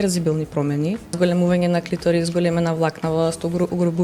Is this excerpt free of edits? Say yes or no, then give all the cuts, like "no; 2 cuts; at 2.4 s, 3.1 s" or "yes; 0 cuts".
no; 1 cut; at 1.1 s